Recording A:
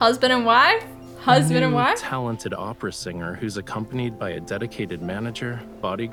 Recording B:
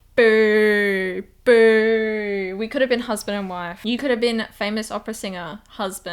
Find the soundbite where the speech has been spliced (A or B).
B